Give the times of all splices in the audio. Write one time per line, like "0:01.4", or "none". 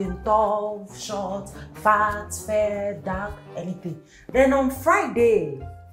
none